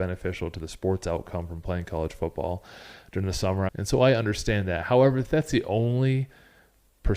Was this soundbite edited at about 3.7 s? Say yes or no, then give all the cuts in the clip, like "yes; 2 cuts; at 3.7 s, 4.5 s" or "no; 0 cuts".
yes; 1 cut; at 3.7 s